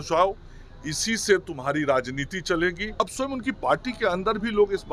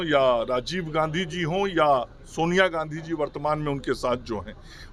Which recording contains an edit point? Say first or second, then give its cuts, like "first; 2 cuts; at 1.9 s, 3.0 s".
first; 1 cut; at 3.0 s